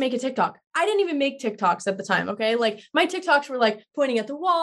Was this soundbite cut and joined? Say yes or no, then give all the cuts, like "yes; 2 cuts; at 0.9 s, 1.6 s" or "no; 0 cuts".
no; 0 cuts